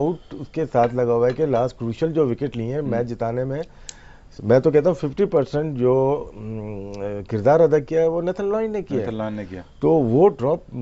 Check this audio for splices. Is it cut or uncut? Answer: cut